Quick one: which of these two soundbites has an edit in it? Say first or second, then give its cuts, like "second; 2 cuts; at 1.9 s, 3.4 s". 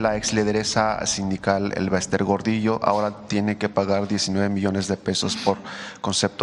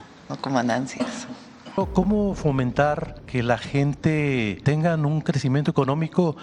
second; 3 cuts; at 1.8 s, 3.1 s, 4.6 s